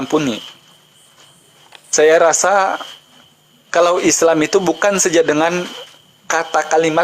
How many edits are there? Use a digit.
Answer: 0